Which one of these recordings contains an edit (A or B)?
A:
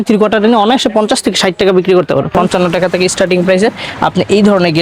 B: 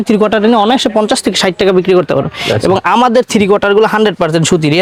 A